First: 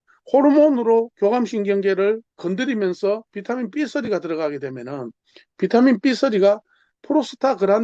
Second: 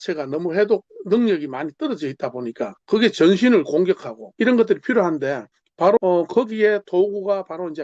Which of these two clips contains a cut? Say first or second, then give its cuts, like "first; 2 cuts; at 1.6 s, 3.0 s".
second; 3 cuts; at 2.7 s, 4.2 s, 6.0 s